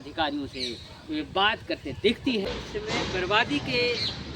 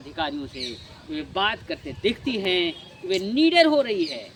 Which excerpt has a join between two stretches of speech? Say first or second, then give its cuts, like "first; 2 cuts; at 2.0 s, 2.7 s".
first; 1 cut; at 2.4 s